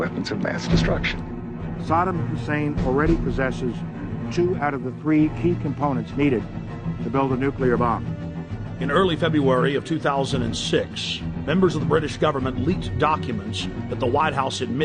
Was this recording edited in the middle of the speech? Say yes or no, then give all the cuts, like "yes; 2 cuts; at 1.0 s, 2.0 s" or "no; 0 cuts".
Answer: no; 0 cuts